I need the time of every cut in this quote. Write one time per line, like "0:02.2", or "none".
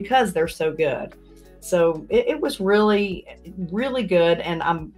none